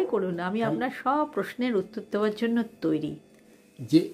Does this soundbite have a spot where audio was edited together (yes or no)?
yes